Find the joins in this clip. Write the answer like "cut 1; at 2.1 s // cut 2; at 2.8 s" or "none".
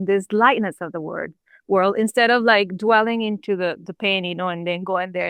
none